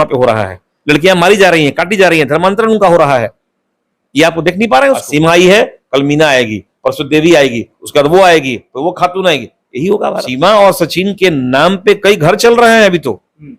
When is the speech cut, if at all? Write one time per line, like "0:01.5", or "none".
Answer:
0:05.0
0:10.2